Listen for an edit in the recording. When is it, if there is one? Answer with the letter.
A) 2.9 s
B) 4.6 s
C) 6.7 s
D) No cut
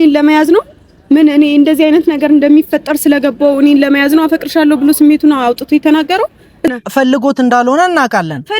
C